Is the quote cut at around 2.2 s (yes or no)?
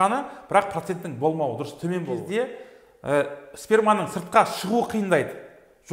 yes